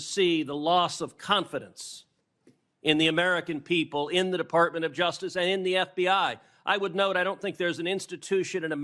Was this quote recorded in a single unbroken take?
yes; 0 cuts

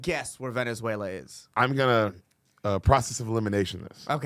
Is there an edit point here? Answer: yes; 1 cut; at 1.5 s

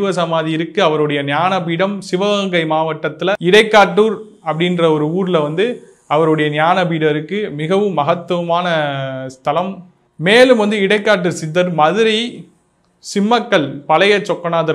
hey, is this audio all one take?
no; 2 cuts; at 3.4 s, 10.0 s

